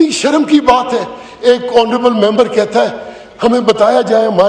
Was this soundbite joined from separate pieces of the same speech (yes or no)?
no